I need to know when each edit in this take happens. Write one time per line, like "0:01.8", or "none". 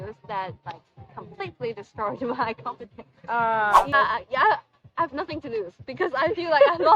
0:03.9